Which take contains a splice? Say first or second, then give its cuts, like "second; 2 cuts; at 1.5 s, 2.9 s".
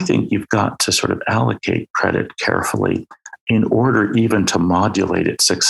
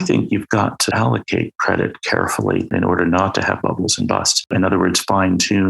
second; 3 cuts; at 0.9 s, 2.7 s, 4.5 s